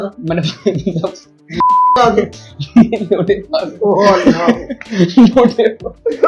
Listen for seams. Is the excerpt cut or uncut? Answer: uncut